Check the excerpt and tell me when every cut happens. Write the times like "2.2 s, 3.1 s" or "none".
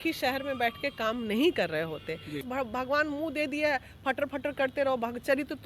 2.5 s